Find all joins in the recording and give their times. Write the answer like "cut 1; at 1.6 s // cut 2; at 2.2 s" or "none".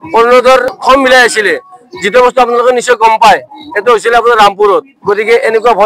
cut 1; at 0.8 s // cut 2; at 4.9 s

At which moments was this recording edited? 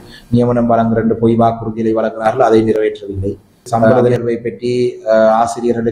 cut 1; at 3.9 s

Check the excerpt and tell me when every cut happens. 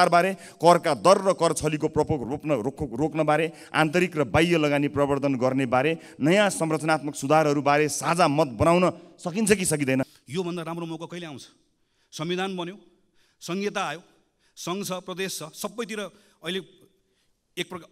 cut 1; at 10.1 s

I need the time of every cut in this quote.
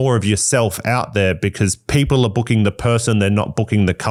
none

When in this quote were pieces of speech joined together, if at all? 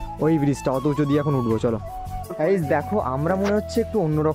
none

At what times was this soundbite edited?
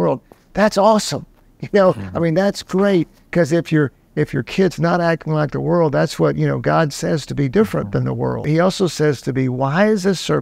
cut 1; at 8.4 s

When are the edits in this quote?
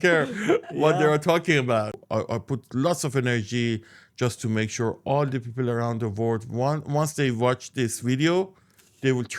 cut 1; at 2.0 s

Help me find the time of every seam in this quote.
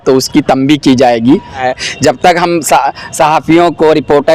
cut 1; at 1.6 s

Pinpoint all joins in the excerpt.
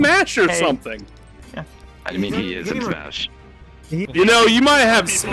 cut 1; at 4.0 s

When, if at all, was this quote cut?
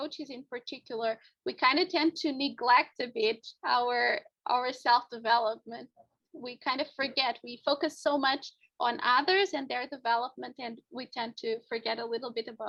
none

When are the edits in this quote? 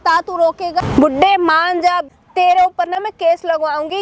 cut 1; at 0.8 s // cut 2; at 2.2 s

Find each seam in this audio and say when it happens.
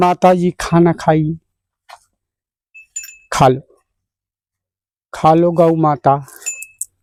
none

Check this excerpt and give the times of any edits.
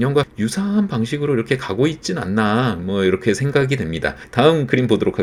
none

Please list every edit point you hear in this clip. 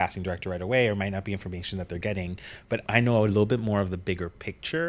cut 1; at 2.8 s

